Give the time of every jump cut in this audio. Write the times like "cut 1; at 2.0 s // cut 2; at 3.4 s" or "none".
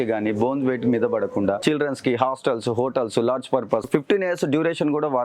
cut 1; at 1.6 s // cut 2; at 3.8 s